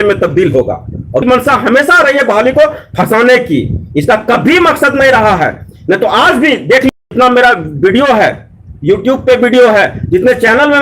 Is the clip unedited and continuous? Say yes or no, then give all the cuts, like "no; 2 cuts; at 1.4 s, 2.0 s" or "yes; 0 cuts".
no; 1 cut; at 1.2 s